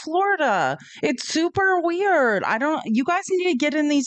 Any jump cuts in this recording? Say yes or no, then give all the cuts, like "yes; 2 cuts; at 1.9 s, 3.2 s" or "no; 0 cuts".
no; 0 cuts